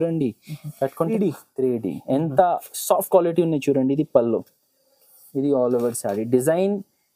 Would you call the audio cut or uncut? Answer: cut